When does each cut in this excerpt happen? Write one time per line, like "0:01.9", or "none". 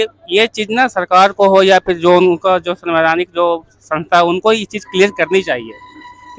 none